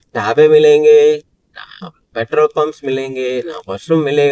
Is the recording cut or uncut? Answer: uncut